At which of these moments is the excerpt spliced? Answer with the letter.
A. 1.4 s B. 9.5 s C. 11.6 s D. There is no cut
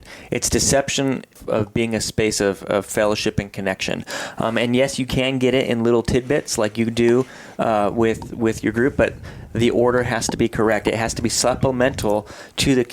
A